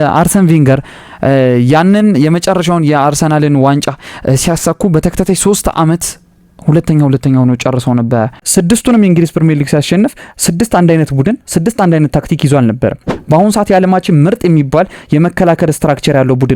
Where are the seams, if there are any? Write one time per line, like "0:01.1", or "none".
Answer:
0:08.4
0:13.1